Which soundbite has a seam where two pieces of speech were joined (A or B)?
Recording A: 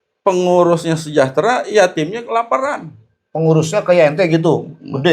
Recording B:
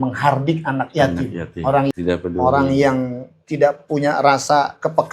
B